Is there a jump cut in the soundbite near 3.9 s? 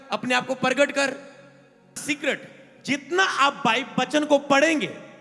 no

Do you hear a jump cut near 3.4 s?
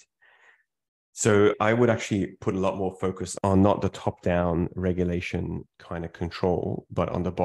yes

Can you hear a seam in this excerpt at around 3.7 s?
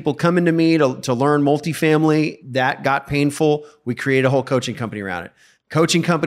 no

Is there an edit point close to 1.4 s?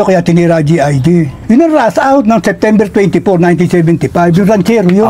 no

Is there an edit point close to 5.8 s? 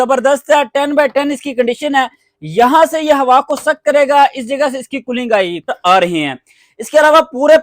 yes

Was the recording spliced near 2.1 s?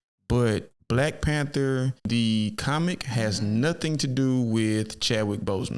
yes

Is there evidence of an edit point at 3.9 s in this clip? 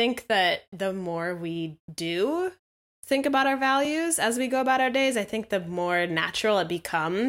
no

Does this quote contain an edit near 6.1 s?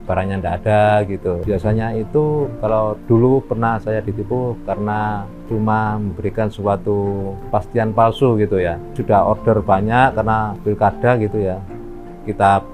no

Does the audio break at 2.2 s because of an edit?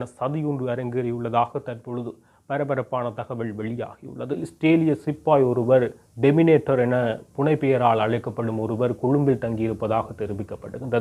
no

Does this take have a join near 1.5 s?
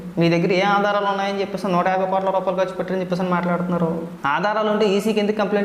no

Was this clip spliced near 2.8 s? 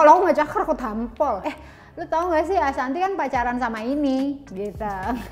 no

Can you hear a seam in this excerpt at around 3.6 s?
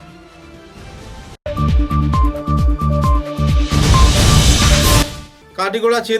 no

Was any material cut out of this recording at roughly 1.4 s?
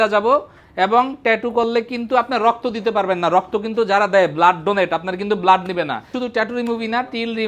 no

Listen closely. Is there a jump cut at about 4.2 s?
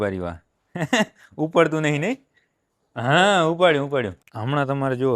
yes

